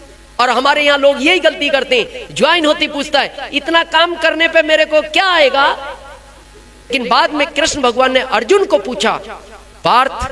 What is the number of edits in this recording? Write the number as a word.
one